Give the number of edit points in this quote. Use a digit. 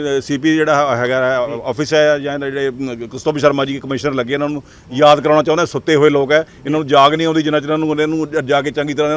0